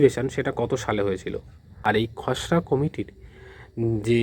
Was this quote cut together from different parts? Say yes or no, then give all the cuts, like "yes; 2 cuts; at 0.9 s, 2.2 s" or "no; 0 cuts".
yes; 1 cut; at 1.6 s